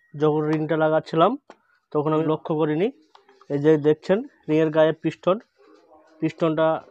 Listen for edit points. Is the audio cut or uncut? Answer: cut